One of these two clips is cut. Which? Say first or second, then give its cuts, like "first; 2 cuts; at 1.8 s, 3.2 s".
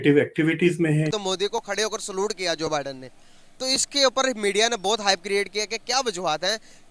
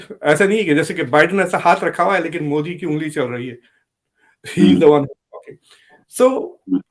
first; 1 cut; at 1.2 s